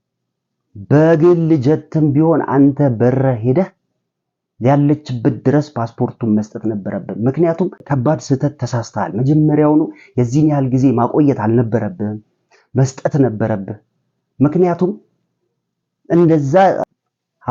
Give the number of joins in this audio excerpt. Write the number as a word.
zero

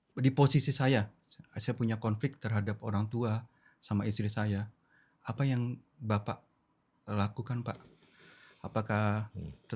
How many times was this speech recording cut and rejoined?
zero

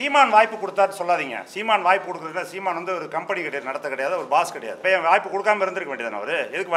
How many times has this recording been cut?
one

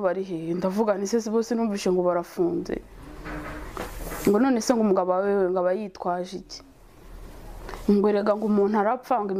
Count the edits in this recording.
zero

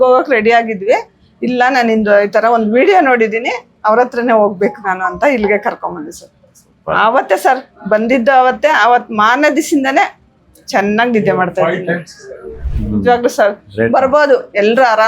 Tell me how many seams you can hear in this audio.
one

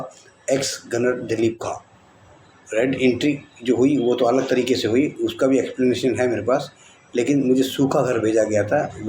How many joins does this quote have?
one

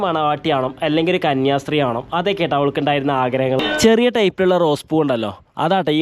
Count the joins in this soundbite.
one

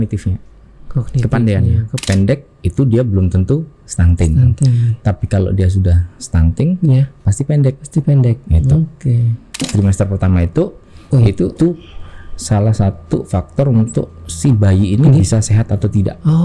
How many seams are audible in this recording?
two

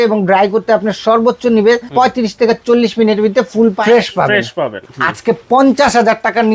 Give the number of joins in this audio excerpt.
three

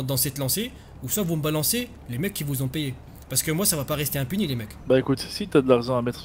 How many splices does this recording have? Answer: one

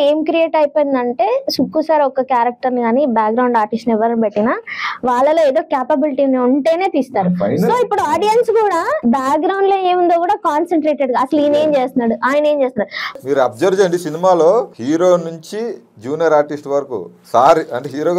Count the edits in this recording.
three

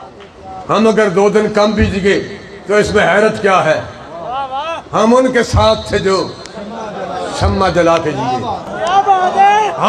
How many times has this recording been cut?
zero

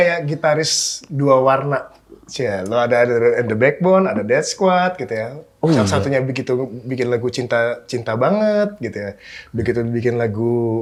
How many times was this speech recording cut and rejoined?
zero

